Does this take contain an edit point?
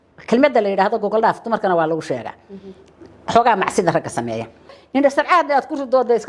yes; 1 cut; at 4.8 s

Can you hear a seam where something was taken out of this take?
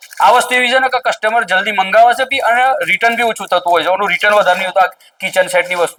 no; 0 cuts

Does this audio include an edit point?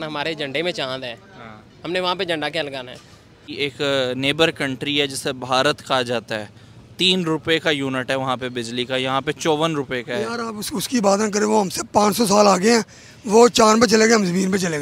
yes; 1 cut; at 3.4 s

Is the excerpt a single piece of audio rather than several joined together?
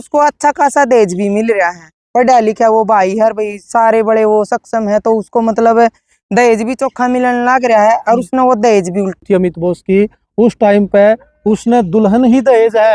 no; 1 cut; at 9.2 s

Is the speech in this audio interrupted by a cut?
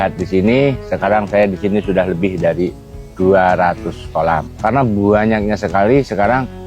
yes; 1 cut; at 4.5 s

